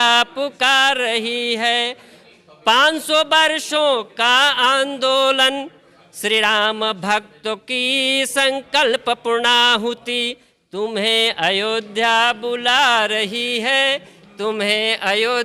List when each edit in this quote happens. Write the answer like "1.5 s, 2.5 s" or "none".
none